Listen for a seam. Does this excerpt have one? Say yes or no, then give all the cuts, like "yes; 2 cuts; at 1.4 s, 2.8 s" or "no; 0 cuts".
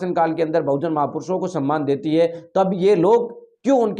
no; 0 cuts